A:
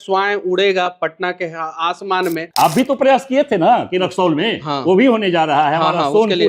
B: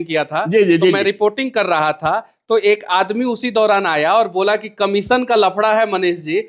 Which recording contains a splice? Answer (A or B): A